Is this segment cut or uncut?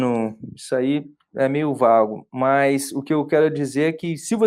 uncut